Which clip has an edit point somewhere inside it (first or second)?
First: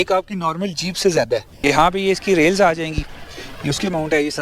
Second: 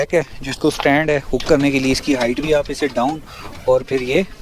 first